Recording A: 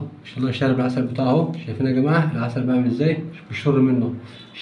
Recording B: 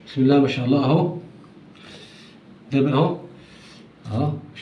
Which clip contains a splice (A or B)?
B